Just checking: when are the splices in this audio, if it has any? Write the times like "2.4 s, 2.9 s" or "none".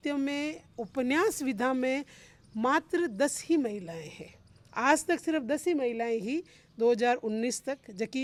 none